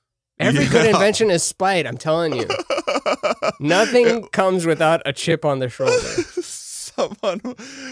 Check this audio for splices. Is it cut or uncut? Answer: cut